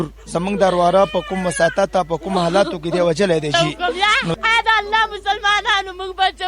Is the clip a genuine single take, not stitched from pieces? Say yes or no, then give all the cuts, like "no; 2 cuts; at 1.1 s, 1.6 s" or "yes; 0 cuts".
no; 1 cut; at 3.5 s